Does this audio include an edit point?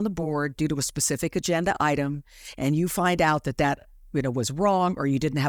no; 0 cuts

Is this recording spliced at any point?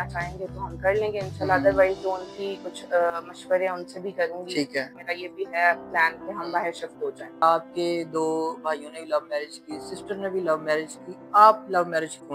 yes; 2 cuts; at 5.0 s, 7.4 s

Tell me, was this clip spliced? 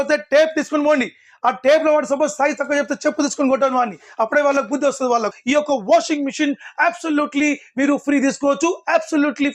yes; 1 cut; at 5.4 s

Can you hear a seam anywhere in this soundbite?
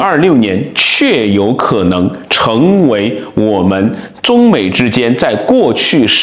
no; 0 cuts

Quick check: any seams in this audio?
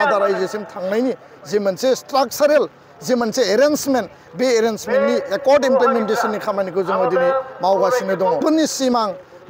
yes; 1 cut; at 8.4 s

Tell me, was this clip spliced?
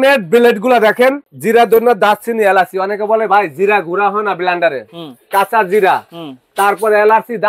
yes; 1 cut; at 1.3 s

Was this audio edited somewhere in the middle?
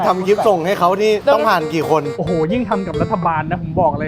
no; 0 cuts

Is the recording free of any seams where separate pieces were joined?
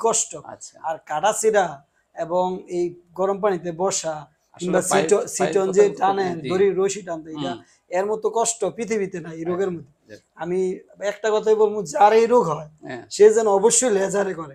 yes; 0 cuts

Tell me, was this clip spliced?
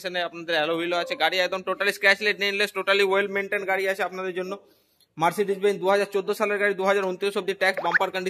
no; 0 cuts

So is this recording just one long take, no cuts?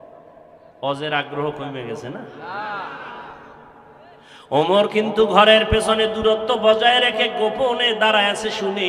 yes; 0 cuts

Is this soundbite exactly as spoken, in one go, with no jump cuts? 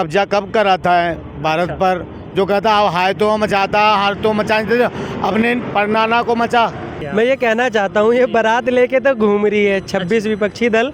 no; 1 cut; at 6.9 s

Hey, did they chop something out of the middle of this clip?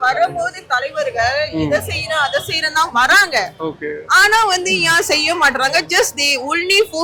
no; 0 cuts

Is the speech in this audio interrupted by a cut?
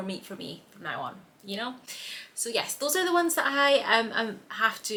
no; 0 cuts

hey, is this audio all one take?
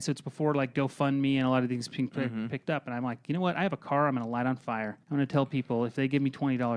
no; 1 cut; at 5.0 s

